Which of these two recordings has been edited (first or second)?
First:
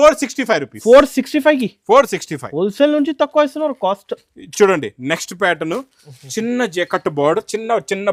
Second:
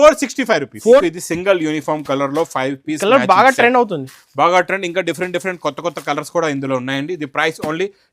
second